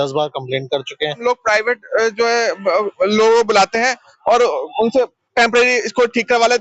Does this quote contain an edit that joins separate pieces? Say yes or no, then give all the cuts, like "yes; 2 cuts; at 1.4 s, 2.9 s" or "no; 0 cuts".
yes; 1 cut; at 1.2 s